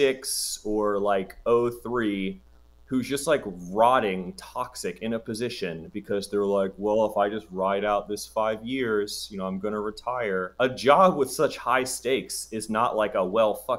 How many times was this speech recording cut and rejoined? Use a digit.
1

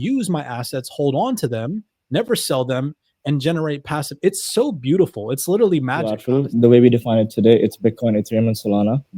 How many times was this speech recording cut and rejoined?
1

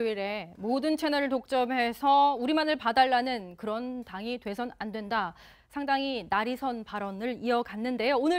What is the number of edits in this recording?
0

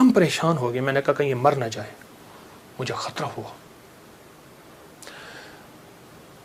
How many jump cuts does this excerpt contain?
0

